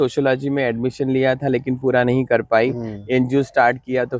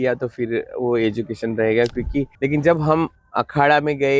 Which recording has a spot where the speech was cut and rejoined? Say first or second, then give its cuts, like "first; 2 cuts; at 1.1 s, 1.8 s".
second; 1 cut; at 2.3 s